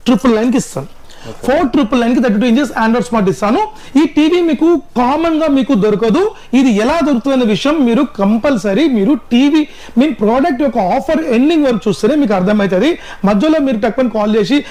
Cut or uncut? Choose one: uncut